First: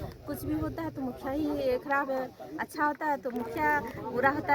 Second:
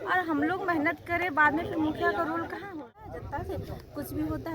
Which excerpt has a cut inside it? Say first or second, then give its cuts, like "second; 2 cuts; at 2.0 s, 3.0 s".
second; 1 cut; at 2.8 s